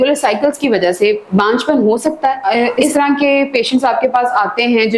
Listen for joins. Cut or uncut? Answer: cut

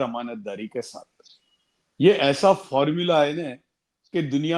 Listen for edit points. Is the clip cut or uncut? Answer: uncut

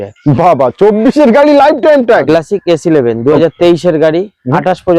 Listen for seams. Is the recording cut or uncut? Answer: cut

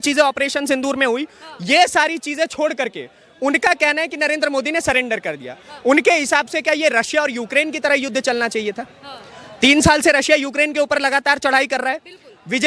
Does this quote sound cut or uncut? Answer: uncut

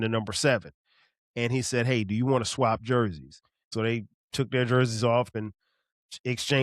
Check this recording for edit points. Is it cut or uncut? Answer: cut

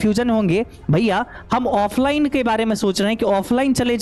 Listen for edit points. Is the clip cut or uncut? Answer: uncut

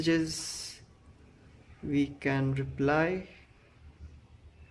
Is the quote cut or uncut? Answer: cut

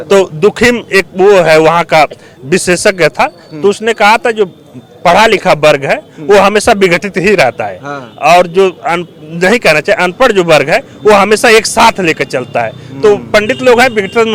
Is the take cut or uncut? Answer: uncut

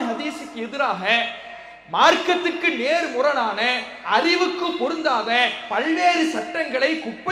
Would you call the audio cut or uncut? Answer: uncut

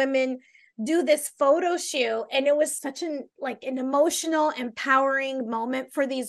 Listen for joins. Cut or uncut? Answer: cut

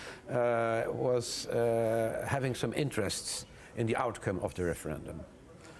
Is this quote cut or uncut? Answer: uncut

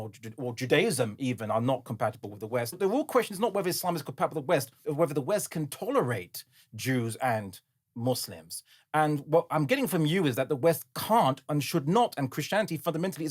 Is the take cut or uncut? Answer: cut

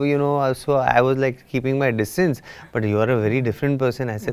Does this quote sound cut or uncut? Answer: uncut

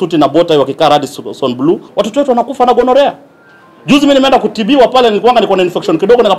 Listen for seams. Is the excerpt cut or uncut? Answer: cut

